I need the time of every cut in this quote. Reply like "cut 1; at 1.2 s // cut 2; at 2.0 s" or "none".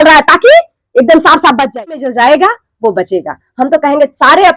cut 1; at 2.0 s